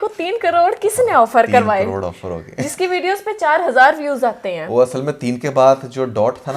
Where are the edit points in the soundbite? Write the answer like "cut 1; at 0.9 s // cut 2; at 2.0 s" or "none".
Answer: none